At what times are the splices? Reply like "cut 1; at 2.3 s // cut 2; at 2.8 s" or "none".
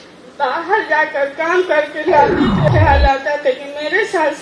cut 1; at 2.7 s